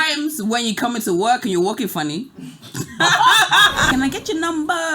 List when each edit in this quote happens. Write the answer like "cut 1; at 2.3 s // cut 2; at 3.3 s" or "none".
cut 1; at 3.8 s